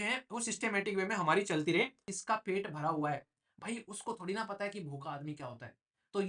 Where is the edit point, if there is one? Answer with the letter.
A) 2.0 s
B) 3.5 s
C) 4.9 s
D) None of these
A